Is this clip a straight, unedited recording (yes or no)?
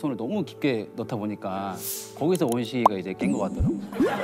yes